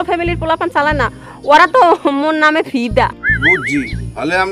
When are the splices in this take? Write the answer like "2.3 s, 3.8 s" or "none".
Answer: 3.3 s